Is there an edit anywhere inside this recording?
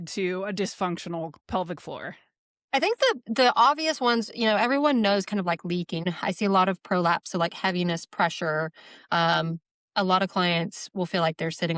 yes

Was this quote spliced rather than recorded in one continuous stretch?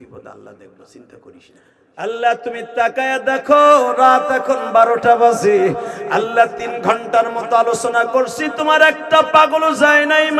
yes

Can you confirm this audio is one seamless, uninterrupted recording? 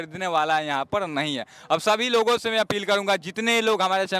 yes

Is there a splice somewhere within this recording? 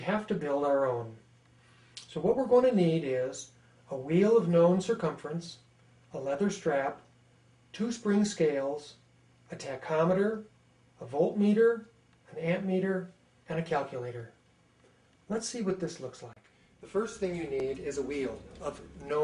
yes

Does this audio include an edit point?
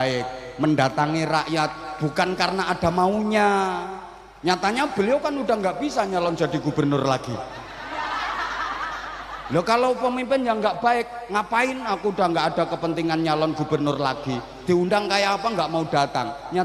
no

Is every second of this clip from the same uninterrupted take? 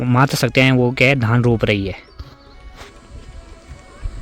yes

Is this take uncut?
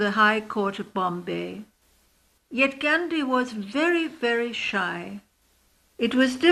yes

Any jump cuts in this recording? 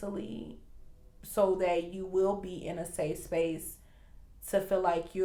no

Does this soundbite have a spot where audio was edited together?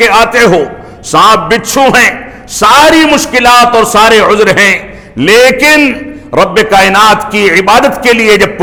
no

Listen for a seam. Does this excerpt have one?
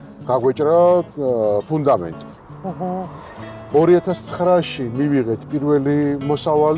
no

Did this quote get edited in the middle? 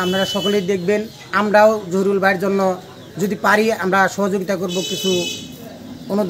no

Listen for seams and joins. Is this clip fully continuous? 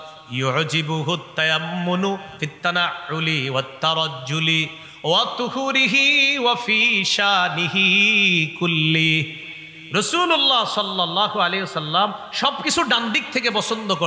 yes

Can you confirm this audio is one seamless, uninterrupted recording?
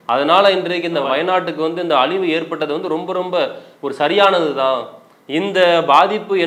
yes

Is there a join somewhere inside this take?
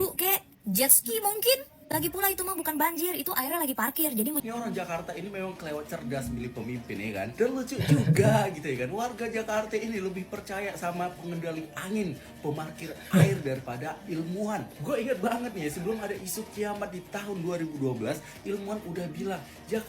yes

